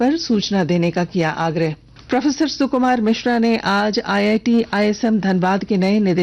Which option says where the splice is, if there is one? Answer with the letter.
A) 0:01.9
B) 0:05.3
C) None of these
A